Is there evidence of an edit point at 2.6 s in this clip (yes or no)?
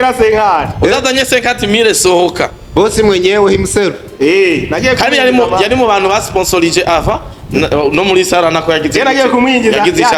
no